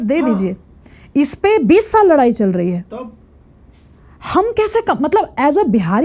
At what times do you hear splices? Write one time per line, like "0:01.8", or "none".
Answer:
none